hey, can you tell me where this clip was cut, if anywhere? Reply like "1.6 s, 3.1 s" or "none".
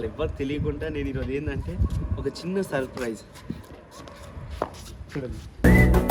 none